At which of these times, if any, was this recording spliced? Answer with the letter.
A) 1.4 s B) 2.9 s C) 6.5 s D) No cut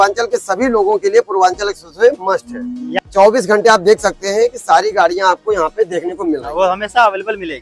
B